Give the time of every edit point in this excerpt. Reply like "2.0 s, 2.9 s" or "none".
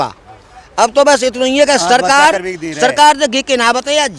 none